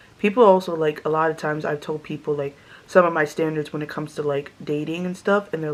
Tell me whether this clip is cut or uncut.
uncut